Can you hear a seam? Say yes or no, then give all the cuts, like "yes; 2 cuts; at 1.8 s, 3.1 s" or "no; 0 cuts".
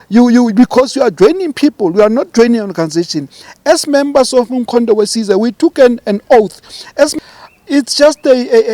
yes; 1 cut; at 7.1 s